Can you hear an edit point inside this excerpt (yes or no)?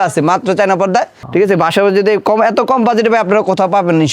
yes